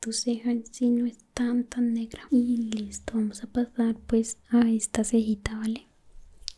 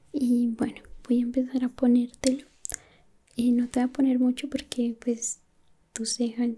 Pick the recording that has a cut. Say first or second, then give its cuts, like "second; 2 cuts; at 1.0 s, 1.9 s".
first; 1 cut; at 2.2 s